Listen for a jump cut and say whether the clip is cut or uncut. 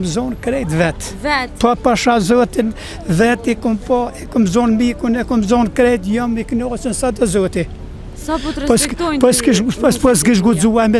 uncut